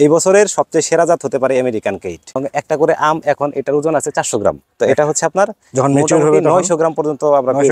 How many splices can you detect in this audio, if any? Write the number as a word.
one